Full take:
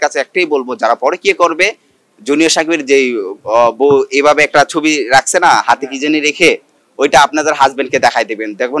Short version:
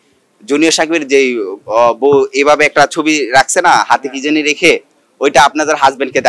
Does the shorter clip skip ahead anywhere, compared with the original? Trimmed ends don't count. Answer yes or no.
no